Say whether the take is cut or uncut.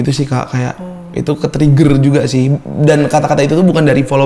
uncut